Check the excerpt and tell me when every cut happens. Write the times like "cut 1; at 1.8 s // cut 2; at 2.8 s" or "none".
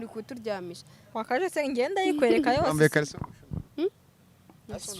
cut 1; at 1.1 s

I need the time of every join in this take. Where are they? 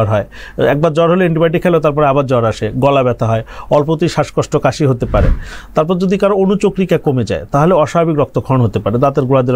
none

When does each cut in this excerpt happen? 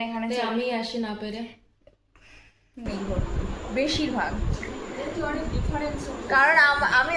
cut 1; at 2.9 s

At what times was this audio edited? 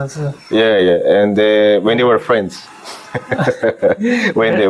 none

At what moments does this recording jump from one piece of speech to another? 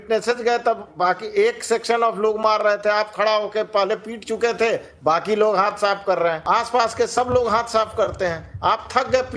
cut 1; at 6.4 s

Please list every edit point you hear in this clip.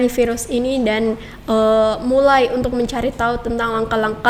none

